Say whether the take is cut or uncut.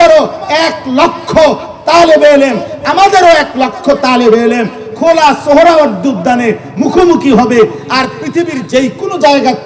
uncut